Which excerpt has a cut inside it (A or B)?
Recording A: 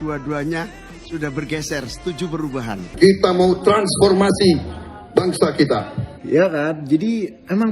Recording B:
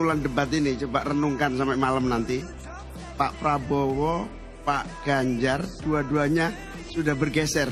A